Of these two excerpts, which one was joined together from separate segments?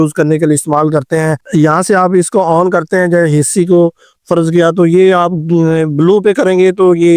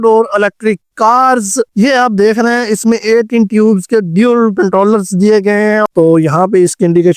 second; 2 cuts; at 1.7 s, 5.9 s

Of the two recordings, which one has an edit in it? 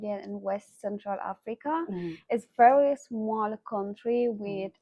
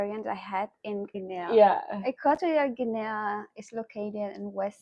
second; 1 cut; at 1.2 s

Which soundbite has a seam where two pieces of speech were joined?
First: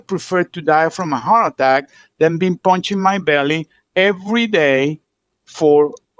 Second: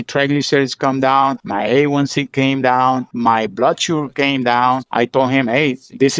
second; 3 cuts; at 1.4 s, 3.1 s, 4.9 s

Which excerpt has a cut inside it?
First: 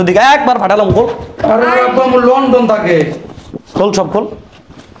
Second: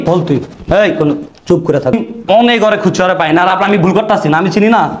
second; 1 cut; at 1.9 s

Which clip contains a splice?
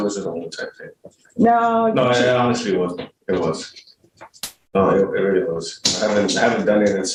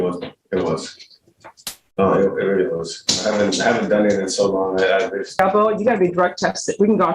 second; 1 cut; at 5.4 s

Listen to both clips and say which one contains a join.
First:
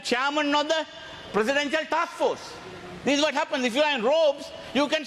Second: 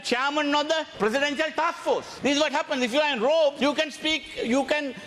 second; 3 cuts; at 0.9 s, 2.1 s, 3.6 s

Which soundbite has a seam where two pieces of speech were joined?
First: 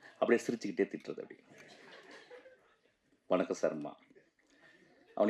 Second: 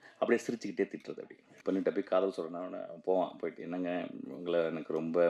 second; 1 cut; at 1.6 s

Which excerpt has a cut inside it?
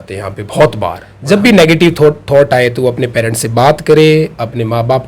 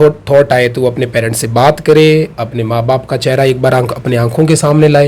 first; 1 cut; at 1.1 s

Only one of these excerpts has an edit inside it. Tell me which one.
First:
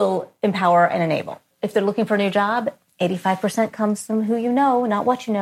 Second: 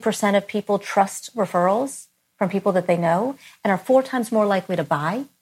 first; 1 cut; at 1.5 s

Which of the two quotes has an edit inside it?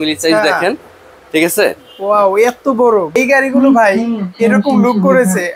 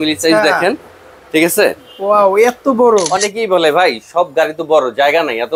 second; 1 cut; at 3.1 s

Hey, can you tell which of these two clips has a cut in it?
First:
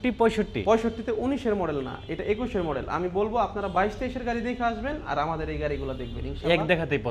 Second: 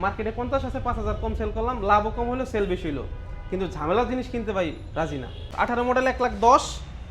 second; 1 cut; at 5.5 s

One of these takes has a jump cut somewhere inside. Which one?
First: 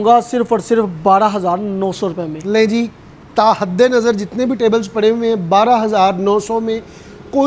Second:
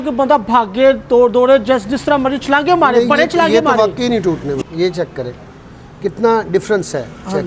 second; 1 cut; at 4.6 s

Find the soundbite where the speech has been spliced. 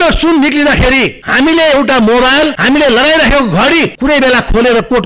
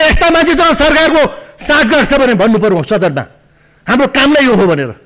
first; 3 cuts; at 1.2 s, 2.6 s, 3.9 s

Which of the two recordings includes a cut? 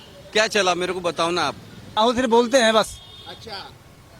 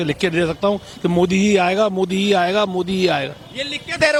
first; 1 cut; at 1.8 s

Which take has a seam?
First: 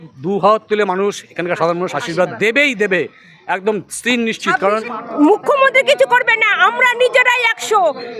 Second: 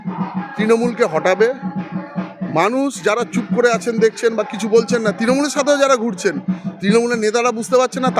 first; 1 cut; at 4.9 s

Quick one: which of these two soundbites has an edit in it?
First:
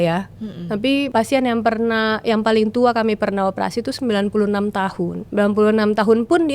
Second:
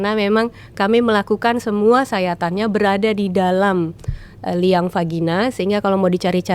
first; 2 cuts; at 1.1 s, 5.2 s

